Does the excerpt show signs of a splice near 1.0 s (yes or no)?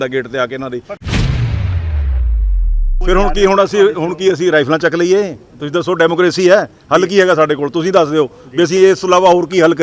yes